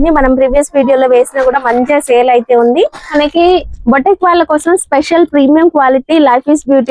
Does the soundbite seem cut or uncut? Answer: cut